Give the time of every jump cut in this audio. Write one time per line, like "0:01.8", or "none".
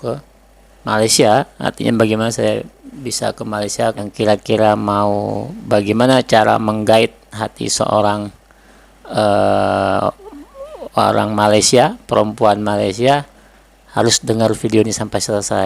0:04.0